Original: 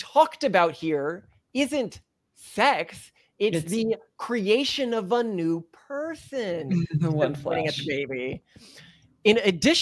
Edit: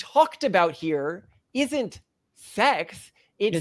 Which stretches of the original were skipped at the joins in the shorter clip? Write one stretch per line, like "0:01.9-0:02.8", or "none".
none